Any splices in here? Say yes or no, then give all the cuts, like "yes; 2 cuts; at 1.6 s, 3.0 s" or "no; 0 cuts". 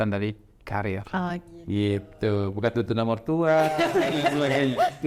no; 0 cuts